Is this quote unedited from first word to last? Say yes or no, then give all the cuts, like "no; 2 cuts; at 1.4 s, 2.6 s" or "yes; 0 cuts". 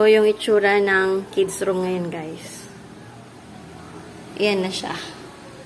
yes; 0 cuts